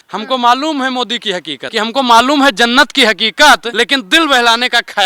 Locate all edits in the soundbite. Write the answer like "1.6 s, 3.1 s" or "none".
1.6 s, 3.7 s